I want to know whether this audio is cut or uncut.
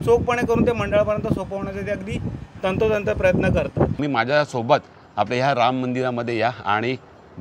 cut